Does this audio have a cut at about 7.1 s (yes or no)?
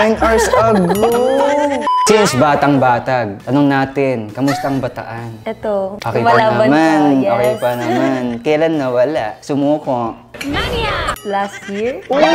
no